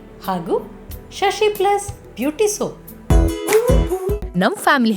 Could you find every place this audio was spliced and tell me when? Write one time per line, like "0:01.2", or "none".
0:02.9